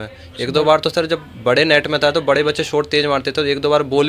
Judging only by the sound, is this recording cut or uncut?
uncut